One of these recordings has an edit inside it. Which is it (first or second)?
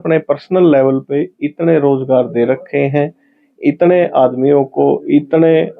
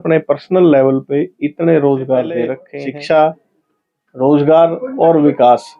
second